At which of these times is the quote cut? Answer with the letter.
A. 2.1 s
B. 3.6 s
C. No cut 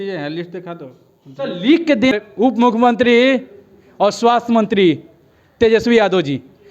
A